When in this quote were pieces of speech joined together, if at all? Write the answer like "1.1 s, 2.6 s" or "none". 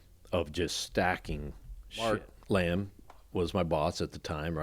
2.0 s